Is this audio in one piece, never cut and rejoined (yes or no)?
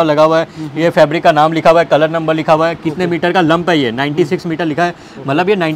yes